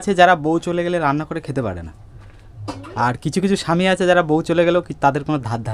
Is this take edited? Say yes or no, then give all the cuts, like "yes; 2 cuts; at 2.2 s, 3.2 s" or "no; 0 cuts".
no; 0 cuts